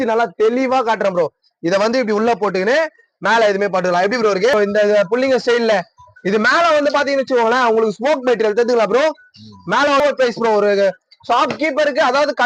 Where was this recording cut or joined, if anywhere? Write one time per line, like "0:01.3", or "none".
0:04.5
0:10.0